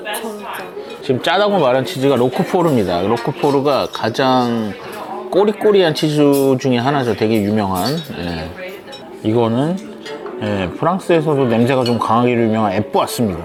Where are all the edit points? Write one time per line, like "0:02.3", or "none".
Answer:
none